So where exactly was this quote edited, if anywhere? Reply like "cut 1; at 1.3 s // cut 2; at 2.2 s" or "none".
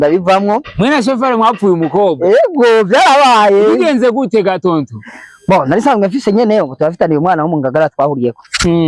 none